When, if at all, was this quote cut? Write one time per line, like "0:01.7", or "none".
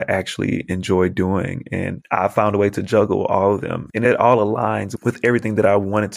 0:03.8
0:04.9